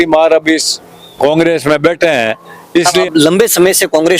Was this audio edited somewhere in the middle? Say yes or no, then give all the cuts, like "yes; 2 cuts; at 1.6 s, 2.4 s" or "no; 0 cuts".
yes; 1 cut; at 3.0 s